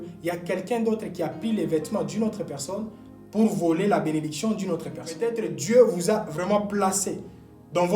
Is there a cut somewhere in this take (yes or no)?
yes